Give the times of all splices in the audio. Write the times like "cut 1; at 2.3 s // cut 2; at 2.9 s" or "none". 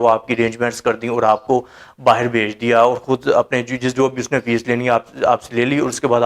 none